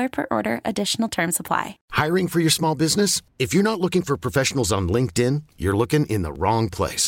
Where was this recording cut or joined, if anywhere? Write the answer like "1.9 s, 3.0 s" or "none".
1.8 s